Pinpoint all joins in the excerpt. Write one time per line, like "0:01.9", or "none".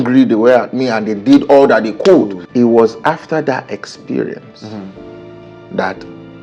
0:02.4